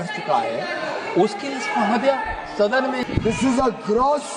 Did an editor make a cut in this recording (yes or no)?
yes